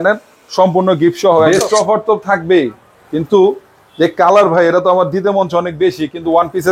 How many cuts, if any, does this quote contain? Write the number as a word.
one